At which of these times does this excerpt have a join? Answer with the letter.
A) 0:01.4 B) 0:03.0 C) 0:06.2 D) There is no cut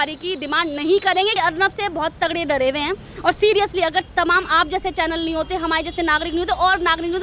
A